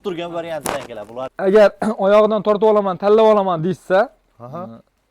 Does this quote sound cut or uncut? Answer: cut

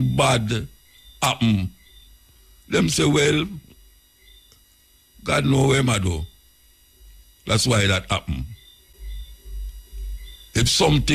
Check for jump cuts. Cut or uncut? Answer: cut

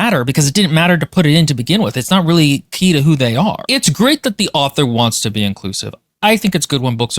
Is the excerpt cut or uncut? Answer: cut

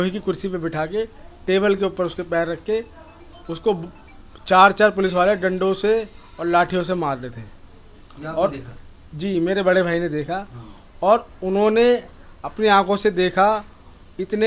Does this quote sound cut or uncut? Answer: uncut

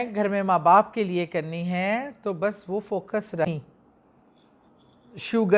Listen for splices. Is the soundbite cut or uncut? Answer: cut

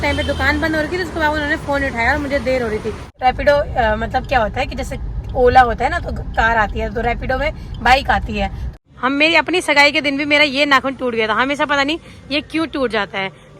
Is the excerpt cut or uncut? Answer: cut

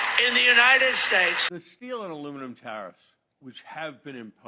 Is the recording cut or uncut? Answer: cut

